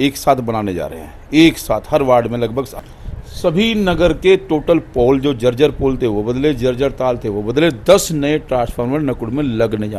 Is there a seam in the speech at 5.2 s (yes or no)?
no